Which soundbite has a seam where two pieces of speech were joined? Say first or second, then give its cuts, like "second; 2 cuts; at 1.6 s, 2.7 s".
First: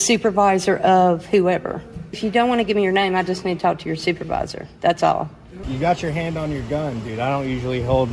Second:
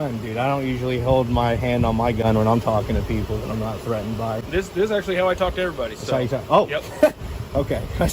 first; 2 cuts; at 2.2 s, 5.6 s